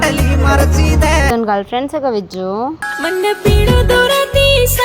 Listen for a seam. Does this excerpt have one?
yes; 1 cut; at 1.3 s

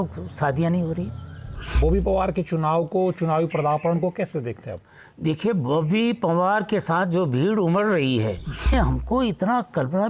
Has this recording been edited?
yes; 2 cuts; at 1.8 s, 8.7 s

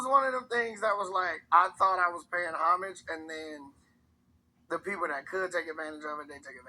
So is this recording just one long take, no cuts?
no; 1 cut; at 1.4 s

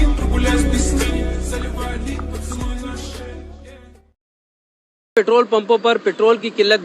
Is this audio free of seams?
no; 1 cut; at 3.9 s

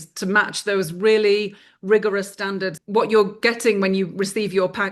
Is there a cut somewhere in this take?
yes; 1 cut; at 2.8 s

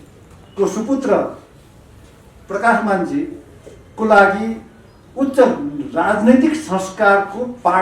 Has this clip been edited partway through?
no; 0 cuts

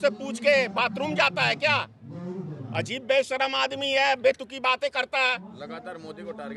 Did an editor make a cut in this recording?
no; 0 cuts

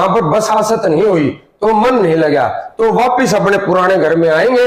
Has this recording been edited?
no; 0 cuts

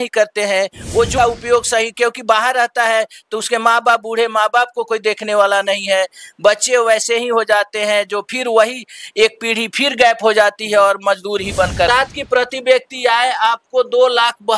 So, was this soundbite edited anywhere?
yes; 2 cuts; at 1.1 s, 11.9 s

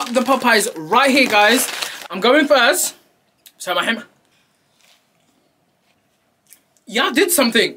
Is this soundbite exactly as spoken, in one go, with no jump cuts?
no; 3 cuts; at 2.0 s, 4.3 s, 5.9 s

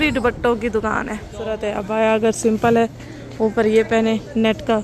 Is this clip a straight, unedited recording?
no; 1 cut; at 1.8 s

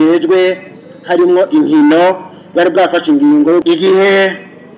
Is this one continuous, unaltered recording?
no; 1 cut; at 3.6 s

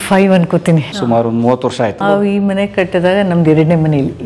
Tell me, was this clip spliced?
yes; 2 cuts; at 1.0 s, 2.0 s

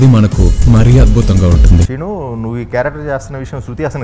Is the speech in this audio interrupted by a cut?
yes; 1 cut; at 1.9 s

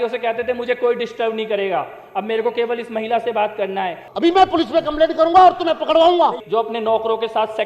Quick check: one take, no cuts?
no; 2 cuts; at 4.0 s, 6.4 s

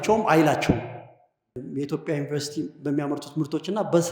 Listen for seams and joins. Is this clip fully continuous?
no; 1 cut; at 1.6 s

